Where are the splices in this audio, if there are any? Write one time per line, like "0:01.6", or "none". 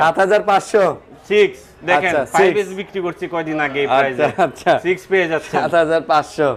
none